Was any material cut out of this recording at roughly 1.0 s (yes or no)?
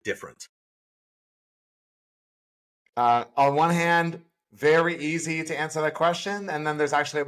no